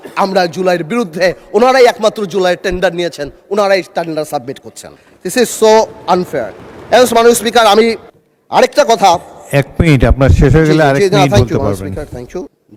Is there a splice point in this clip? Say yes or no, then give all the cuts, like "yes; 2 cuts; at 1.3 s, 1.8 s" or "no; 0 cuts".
no; 0 cuts